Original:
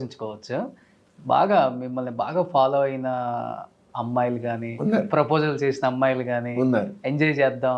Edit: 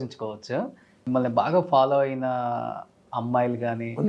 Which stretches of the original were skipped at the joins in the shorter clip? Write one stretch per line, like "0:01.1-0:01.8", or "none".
0:01.0-0:01.8